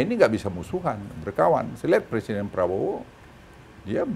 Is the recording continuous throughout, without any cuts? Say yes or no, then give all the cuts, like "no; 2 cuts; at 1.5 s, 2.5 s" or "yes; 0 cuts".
yes; 0 cuts